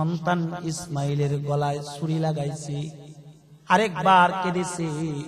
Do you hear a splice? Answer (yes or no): no